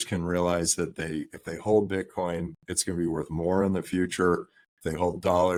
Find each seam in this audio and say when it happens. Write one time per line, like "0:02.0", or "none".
none